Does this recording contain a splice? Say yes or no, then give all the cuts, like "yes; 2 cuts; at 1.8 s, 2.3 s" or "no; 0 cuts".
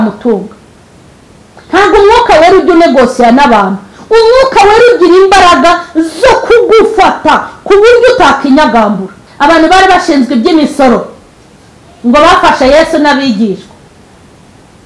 yes; 1 cut; at 9.2 s